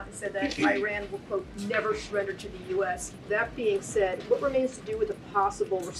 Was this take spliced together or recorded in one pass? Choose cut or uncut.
uncut